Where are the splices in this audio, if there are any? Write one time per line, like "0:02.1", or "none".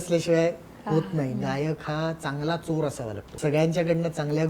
0:01.4
0:03.3